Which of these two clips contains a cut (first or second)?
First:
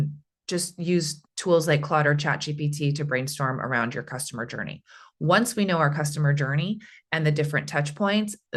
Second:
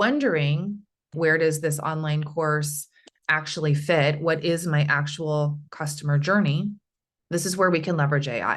second